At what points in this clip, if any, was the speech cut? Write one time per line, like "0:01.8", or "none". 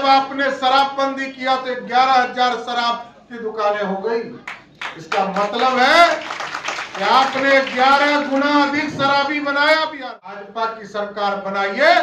0:10.4

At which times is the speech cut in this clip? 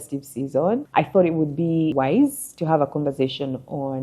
0:00.9
0:01.9

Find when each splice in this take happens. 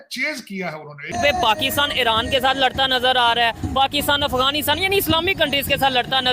0:01.1

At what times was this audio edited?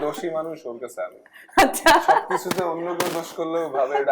none

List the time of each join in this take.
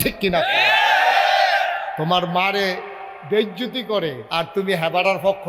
0:04.2

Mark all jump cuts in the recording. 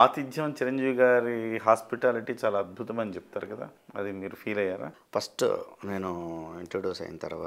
0:03.8
0:05.0

